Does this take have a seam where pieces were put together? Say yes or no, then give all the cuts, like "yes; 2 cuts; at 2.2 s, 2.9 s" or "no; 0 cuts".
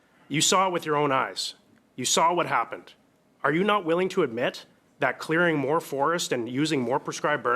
no; 0 cuts